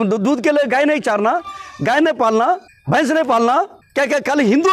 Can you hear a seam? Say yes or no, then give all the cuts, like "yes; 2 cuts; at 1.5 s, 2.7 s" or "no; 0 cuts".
yes; 2 cuts; at 2.7 s, 3.8 s